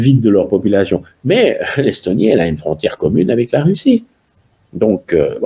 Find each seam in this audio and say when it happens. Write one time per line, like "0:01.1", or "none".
none